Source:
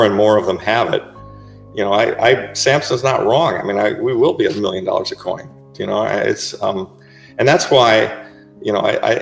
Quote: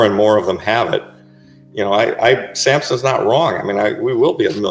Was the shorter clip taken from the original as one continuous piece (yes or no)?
yes